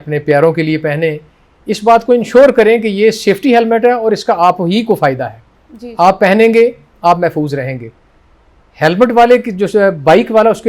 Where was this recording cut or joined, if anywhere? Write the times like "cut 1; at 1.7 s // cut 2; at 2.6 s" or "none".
none